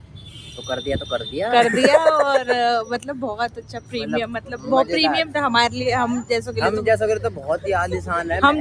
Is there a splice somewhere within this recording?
no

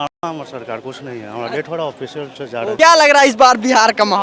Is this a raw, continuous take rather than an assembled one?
yes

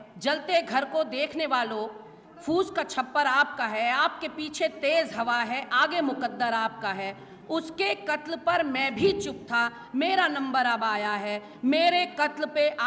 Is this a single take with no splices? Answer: yes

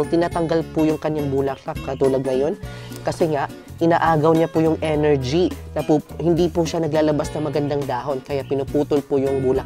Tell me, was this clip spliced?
no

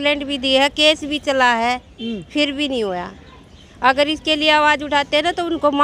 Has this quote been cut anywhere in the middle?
no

